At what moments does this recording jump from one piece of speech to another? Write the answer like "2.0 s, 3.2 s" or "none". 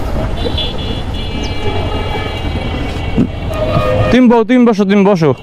none